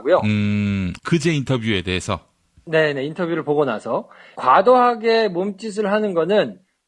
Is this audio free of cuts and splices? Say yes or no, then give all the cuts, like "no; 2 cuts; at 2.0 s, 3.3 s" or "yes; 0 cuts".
no; 1 cut; at 1.5 s